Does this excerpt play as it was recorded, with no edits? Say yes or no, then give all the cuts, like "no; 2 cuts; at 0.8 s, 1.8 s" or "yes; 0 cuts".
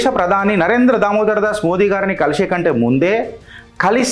yes; 0 cuts